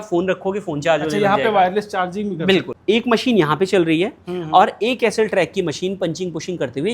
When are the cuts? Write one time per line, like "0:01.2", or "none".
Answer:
0:02.7